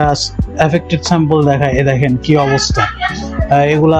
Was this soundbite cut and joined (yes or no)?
no